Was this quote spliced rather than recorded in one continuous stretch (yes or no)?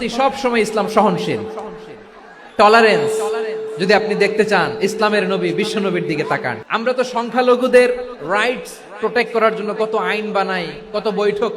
yes